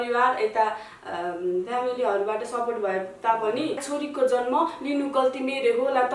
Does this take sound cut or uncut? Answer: cut